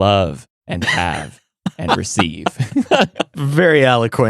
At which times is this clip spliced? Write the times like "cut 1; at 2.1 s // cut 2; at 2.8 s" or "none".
cut 1; at 3.3 s